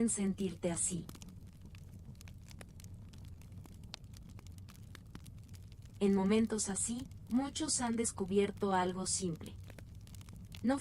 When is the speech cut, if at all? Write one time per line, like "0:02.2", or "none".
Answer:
0:01.6
0:06.0